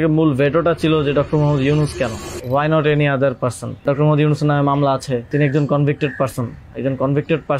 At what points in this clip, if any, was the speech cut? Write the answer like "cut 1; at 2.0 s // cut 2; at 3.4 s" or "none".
cut 1; at 2.3 s // cut 2; at 3.8 s // cut 3; at 5.3 s